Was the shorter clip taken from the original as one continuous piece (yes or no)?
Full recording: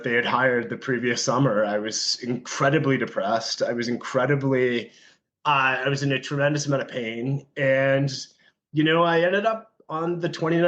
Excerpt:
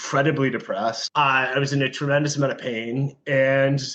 no